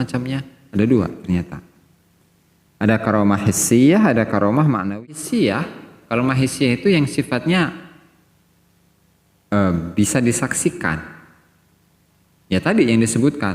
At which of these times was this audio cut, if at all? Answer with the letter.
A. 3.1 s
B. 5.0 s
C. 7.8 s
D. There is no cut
B